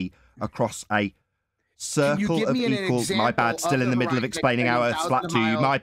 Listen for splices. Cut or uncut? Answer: uncut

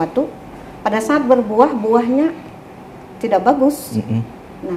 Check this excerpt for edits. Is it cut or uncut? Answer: uncut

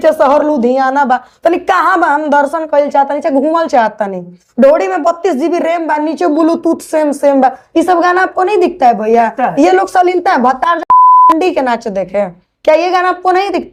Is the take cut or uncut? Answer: uncut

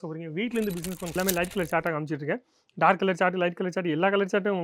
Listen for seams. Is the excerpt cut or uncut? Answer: cut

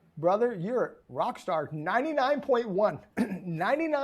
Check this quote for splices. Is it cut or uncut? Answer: cut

